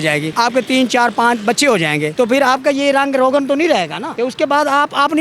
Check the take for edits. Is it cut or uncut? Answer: cut